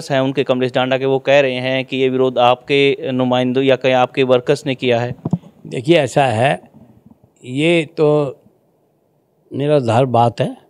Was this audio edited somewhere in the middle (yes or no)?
no